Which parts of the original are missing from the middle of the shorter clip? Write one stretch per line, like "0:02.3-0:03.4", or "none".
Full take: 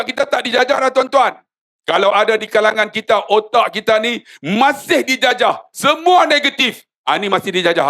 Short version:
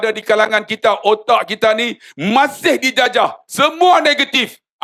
none